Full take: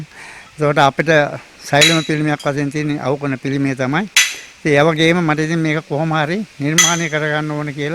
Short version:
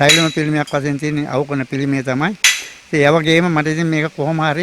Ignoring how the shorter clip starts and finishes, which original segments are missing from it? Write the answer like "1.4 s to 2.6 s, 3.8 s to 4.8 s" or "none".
none

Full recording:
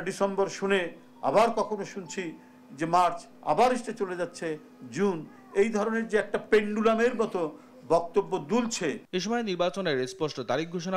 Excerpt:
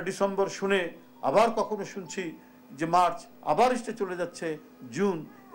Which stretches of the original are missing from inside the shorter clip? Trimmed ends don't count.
none

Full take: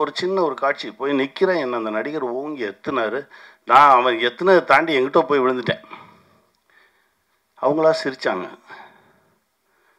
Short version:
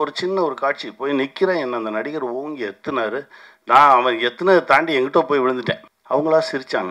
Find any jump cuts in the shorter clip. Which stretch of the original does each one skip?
5.9 s to 7.4 s

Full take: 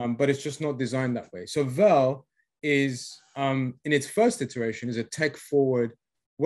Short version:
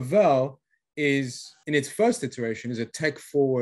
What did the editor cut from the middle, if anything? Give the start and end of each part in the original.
3.2 s to 3.8 s

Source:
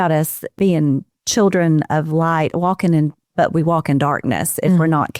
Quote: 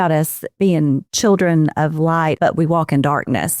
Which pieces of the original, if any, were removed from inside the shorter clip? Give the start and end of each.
1.1 s to 1.2 s, 2.5 s to 3.3 s

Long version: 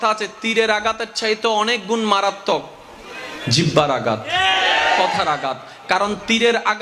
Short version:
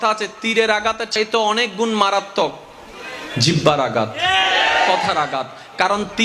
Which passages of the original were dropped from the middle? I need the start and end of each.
1.1 s to 1.2 s

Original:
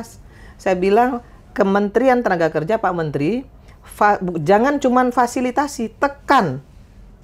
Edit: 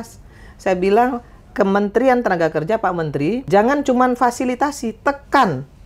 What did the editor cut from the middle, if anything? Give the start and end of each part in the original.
3.4 s to 4.4 s

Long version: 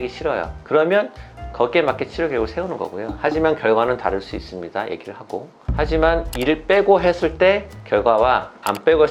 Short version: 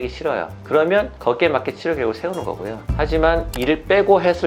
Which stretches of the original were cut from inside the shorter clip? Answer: 1.1 s to 1.5 s, 3.1 s to 5.6 s

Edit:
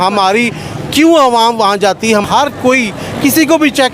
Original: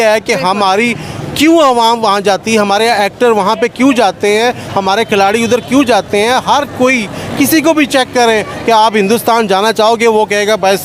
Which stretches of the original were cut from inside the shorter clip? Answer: 2.7 s to 6.4 s

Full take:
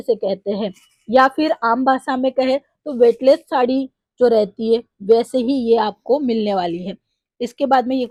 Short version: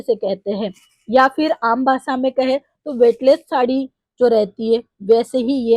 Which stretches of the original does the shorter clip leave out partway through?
none

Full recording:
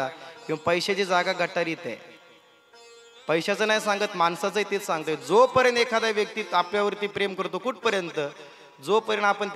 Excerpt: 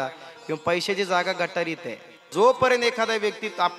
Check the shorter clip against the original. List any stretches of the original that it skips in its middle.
2.3 s to 5.2 s

